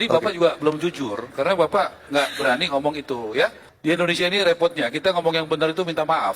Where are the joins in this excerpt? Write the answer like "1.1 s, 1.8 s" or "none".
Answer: 3.7 s

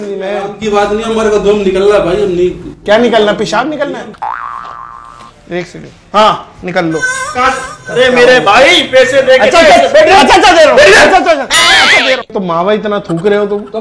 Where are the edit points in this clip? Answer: 4.1 s, 12.3 s

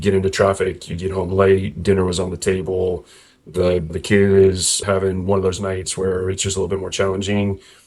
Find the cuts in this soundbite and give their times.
4.0 s

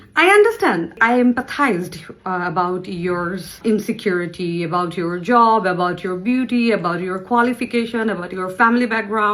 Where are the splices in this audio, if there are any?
1.0 s, 3.6 s

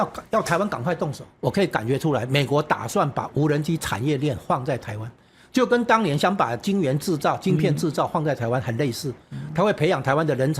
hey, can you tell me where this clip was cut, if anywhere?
1.3 s

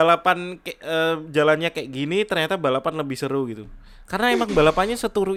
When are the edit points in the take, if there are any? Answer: none

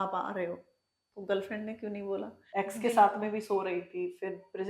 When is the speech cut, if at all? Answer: 2.4 s

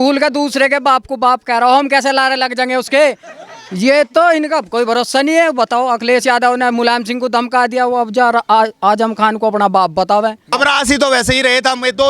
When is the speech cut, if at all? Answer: 10.5 s

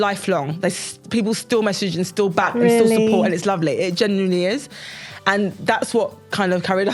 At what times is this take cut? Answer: none

